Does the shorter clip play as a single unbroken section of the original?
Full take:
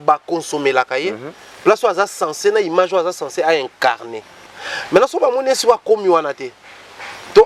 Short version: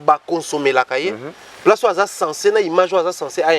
yes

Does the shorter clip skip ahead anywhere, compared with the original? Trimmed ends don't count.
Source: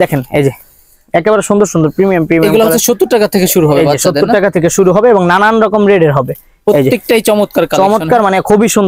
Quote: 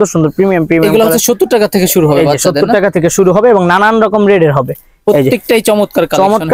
no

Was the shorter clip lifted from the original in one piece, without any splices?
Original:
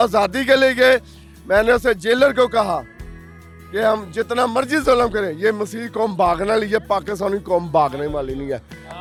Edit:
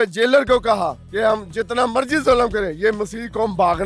no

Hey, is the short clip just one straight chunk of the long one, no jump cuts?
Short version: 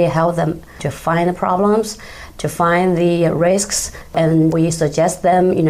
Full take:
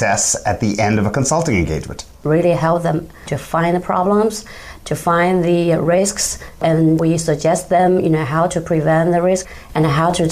yes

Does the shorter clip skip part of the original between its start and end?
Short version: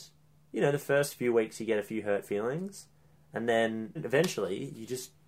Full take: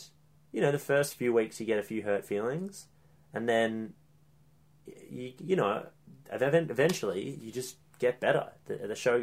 yes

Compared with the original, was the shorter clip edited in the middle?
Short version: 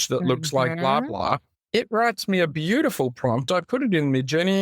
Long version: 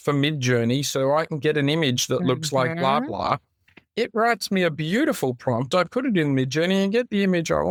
yes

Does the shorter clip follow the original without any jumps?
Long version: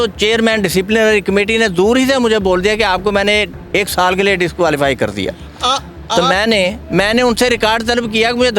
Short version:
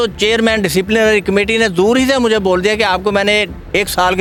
yes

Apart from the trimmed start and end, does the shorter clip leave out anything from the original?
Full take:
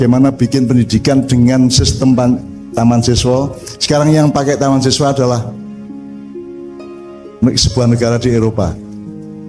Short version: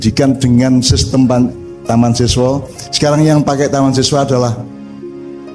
yes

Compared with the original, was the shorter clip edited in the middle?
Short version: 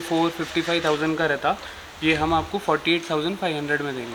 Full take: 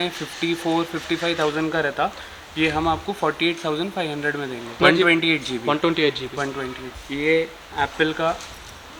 no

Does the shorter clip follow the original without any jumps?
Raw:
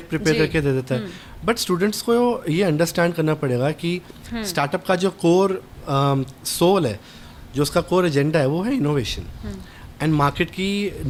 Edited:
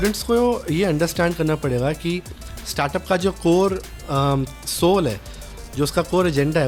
yes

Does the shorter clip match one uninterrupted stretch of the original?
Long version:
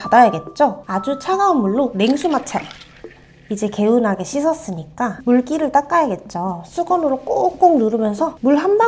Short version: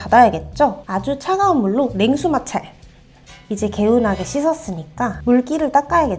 yes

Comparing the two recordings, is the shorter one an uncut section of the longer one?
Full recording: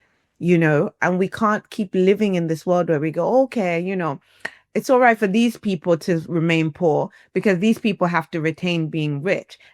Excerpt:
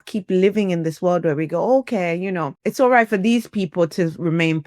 no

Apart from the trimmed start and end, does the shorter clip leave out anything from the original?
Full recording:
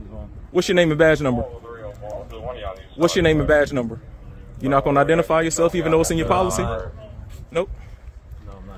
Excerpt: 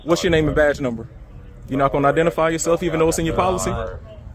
no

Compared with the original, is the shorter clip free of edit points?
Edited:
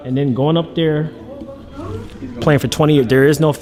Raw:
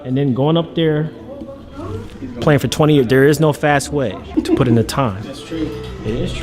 yes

